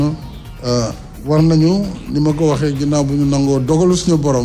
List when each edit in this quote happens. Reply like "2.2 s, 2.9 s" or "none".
1.1 s

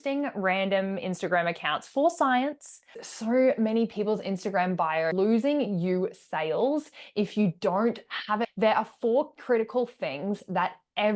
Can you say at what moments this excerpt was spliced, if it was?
3.1 s, 5.1 s, 8.4 s

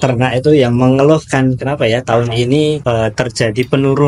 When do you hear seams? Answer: 2.8 s

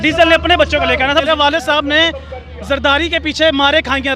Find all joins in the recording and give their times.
1.2 s

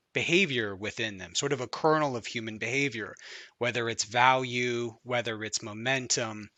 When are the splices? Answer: none

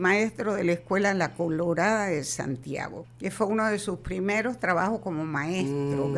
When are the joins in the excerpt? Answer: 3.0 s

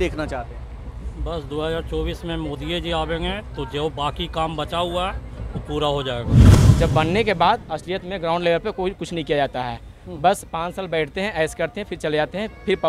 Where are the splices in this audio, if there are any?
6.6 s

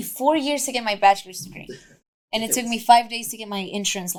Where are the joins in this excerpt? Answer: none

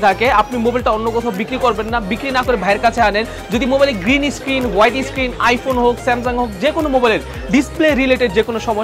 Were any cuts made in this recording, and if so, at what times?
none

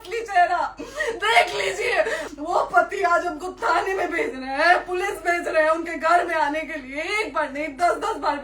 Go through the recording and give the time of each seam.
2.2 s

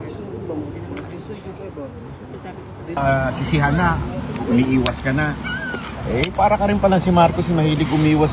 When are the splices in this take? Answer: 3.0 s

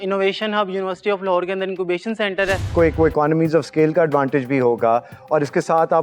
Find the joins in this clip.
2.7 s

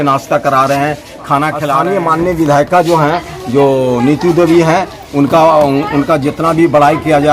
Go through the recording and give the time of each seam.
1.7 s

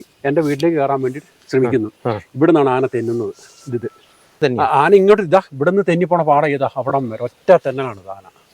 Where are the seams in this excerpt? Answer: 4.4 s

